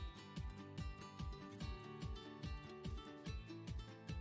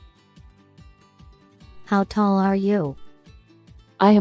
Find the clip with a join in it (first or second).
second